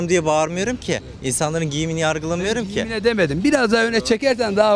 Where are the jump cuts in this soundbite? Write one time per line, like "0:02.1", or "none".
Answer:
none